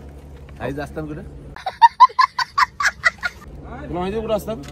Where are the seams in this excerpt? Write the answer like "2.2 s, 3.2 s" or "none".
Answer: none